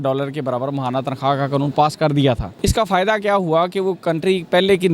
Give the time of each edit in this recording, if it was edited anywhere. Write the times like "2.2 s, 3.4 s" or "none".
2.5 s